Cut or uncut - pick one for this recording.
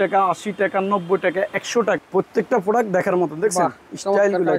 cut